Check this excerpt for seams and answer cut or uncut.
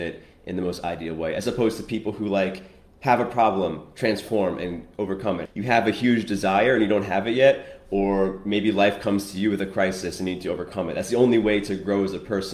cut